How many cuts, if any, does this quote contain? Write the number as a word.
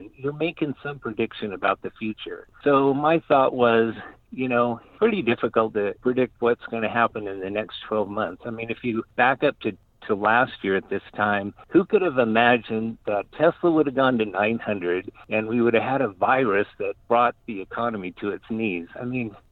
four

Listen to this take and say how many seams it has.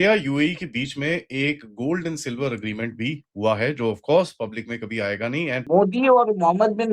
one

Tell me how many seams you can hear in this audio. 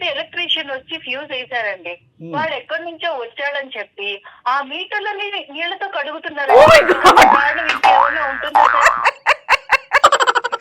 zero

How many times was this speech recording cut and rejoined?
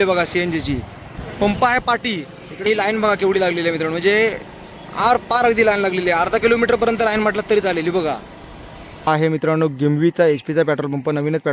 three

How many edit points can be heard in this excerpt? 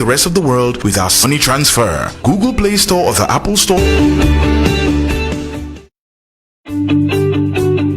three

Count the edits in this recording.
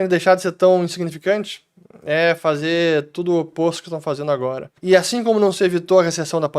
one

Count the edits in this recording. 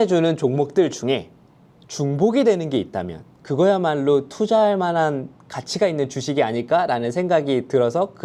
zero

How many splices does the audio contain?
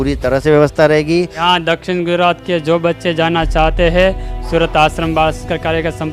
one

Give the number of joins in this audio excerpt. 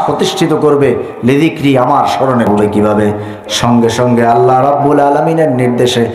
one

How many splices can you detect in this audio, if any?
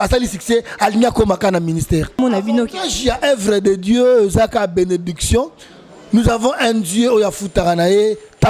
one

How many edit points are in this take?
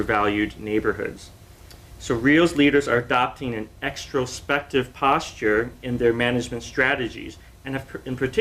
zero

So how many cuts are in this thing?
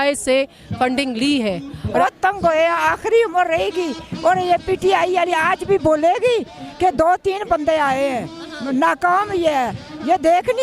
one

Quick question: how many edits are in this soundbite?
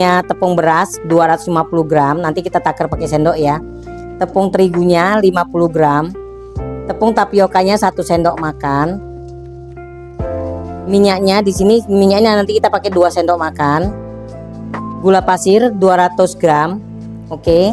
two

